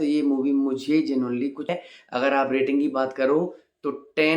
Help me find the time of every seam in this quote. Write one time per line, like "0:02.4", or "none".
0:01.7